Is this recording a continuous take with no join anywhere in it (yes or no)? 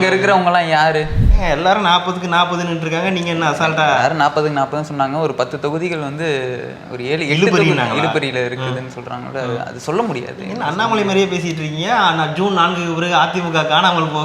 no